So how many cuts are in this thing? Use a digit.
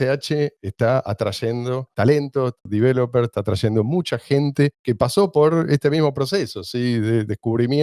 2